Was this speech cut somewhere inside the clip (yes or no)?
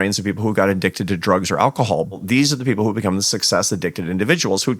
yes